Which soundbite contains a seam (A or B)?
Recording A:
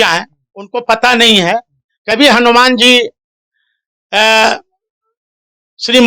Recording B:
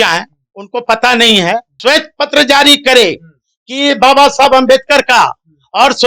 B